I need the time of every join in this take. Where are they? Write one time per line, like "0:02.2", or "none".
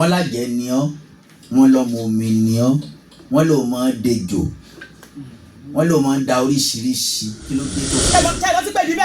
0:08.0